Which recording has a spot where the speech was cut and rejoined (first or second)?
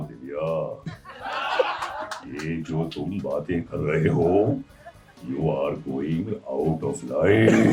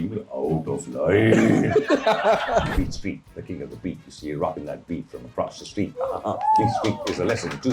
second